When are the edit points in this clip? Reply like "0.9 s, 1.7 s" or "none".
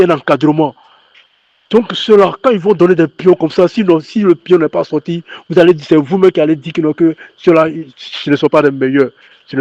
none